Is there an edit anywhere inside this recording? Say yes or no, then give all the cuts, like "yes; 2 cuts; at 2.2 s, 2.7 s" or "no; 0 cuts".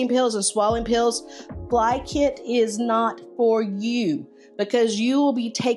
no; 0 cuts